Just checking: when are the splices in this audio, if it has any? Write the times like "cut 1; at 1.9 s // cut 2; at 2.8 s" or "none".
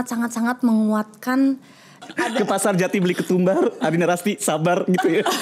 cut 1; at 2.0 s